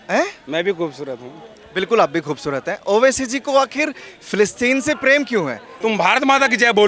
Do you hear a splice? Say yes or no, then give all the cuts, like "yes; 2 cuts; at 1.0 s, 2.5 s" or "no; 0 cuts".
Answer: yes; 1 cut; at 5.7 s